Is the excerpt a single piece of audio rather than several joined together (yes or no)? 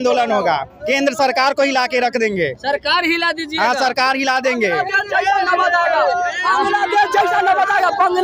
yes